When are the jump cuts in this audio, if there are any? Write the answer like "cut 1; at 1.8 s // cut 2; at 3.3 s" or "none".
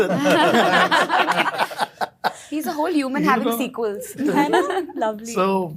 none